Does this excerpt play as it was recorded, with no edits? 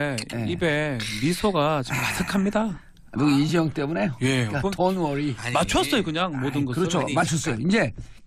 yes; 0 cuts

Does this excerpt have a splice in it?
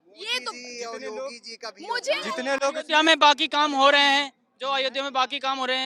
no; 0 cuts

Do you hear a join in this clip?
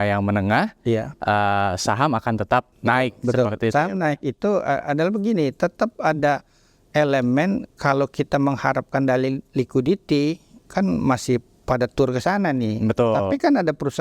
yes; 1 cut; at 2.7 s

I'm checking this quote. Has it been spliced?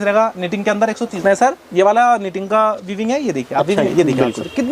yes; 2 cuts; at 1.2 s, 3.9 s

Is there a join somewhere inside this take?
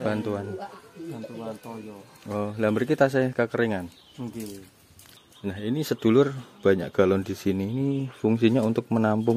yes; 1 cut; at 5.2 s

